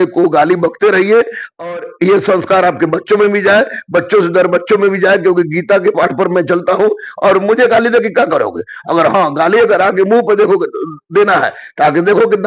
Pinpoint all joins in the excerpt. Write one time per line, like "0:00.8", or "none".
none